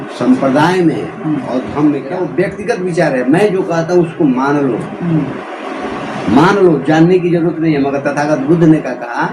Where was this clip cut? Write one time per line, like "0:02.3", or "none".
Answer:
0:02.2